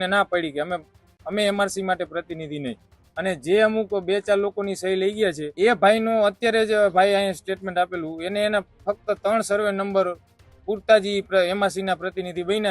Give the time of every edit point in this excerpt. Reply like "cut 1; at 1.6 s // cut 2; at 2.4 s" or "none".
cut 1; at 5.4 s